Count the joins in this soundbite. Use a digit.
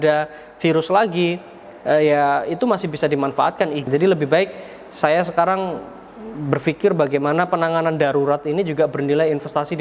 1